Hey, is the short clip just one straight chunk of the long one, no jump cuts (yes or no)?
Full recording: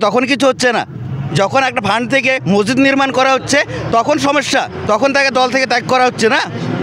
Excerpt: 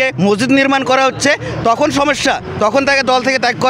yes